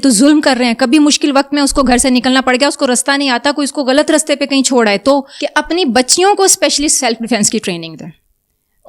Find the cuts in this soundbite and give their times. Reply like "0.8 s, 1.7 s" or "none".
5.4 s